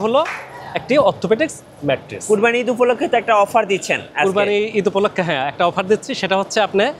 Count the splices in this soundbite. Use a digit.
1